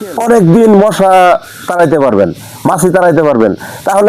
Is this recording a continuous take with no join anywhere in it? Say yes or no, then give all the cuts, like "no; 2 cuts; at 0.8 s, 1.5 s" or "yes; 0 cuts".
yes; 0 cuts